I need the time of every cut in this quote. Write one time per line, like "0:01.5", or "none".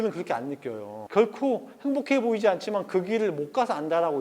0:01.0